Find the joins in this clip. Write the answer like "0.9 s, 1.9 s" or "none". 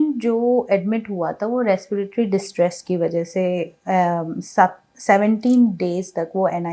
none